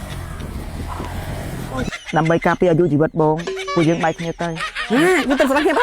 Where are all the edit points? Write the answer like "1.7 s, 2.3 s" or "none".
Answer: 1.9 s

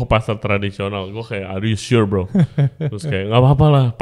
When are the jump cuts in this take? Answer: none

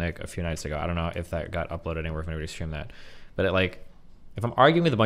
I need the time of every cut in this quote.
none

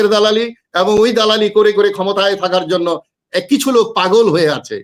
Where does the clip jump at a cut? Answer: none

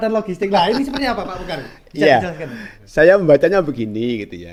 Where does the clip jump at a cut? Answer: none

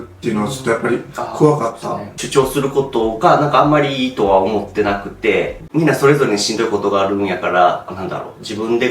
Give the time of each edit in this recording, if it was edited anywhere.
2.1 s, 5.6 s

